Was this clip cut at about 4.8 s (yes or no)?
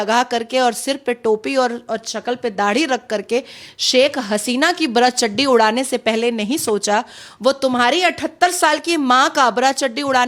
no